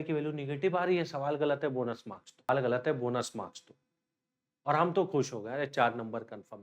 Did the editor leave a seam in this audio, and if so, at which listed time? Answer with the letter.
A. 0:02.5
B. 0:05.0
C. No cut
A